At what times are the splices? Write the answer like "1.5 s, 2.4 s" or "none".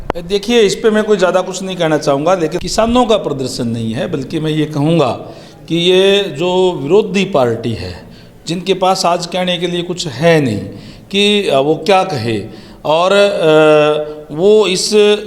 2.6 s